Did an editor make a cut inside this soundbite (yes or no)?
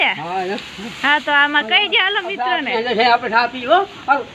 no